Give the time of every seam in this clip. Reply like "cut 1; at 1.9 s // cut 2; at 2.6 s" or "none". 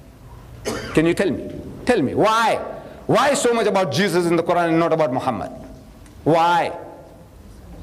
cut 1; at 3.1 s